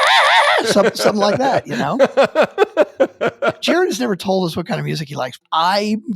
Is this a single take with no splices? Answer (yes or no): no